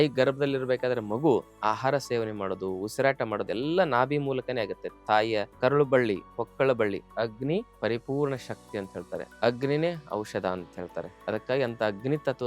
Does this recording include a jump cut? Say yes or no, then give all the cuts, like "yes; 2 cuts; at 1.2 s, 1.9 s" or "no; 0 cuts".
yes; 4 cuts; at 5.5 s, 7.2 s, 9.3 s, 11.1 s